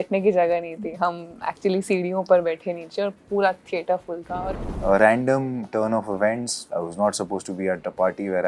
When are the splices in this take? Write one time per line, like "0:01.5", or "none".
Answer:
0:04.7